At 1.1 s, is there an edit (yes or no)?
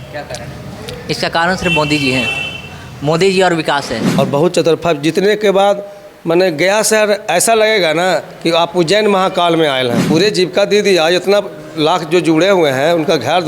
no